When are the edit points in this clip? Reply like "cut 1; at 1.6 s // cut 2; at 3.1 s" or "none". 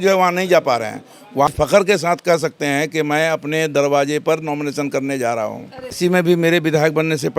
cut 1; at 1.5 s // cut 2; at 6.0 s

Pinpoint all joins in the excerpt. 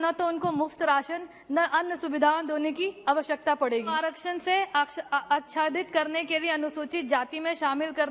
cut 1; at 3.9 s

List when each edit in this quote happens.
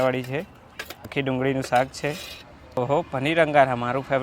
cut 1; at 1.1 s // cut 2; at 2.6 s

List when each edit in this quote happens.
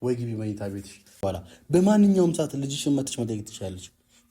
cut 1; at 1.1 s

